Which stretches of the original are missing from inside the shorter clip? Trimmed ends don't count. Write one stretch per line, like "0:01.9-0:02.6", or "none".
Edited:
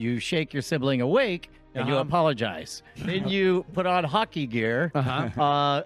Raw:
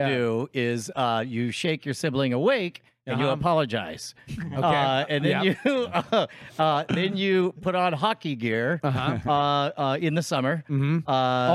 0:04.4-0:07.0